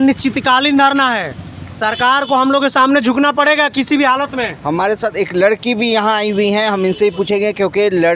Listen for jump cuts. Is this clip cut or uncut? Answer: uncut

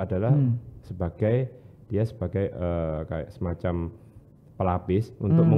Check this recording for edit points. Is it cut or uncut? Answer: uncut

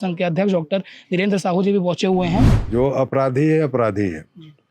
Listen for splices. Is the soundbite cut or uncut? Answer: cut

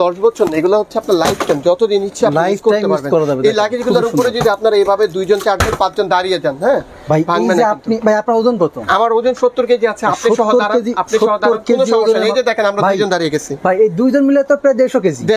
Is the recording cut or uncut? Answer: uncut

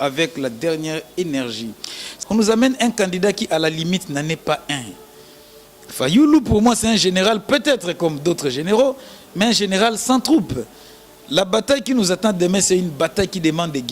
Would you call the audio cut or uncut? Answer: cut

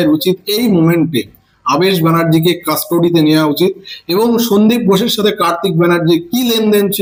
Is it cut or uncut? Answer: uncut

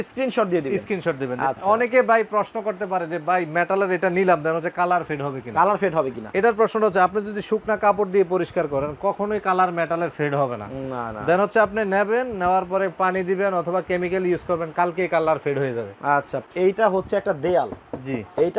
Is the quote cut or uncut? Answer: cut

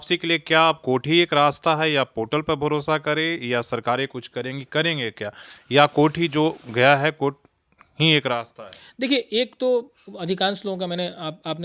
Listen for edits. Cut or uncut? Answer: uncut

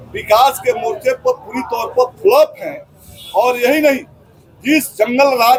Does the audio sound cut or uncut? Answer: uncut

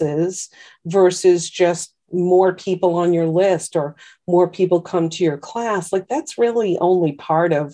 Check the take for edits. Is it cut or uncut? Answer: cut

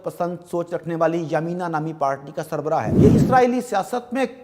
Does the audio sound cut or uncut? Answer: cut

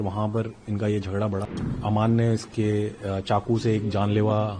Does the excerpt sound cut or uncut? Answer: cut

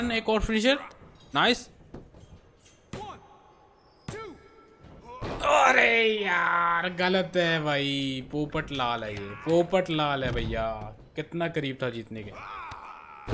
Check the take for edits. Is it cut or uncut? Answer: uncut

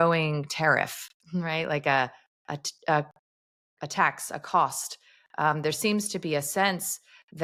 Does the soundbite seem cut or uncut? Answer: uncut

